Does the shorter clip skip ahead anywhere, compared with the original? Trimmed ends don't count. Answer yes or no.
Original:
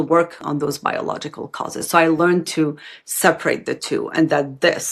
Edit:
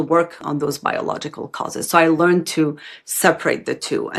no